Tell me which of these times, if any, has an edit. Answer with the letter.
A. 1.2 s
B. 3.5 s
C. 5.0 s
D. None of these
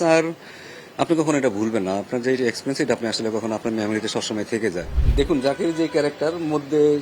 C